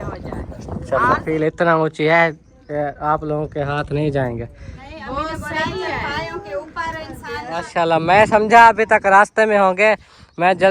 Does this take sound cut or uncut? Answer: cut